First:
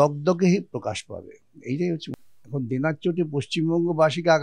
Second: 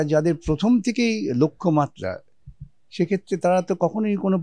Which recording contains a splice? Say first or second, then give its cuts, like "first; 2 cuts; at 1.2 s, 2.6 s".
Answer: first; 1 cut; at 2.3 s